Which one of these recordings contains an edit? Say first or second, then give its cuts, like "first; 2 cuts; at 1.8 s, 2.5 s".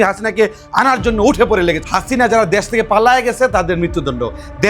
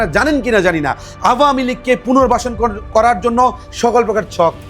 first; 1 cut; at 1.8 s